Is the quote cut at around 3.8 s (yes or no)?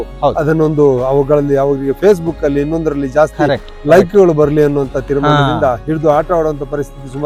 no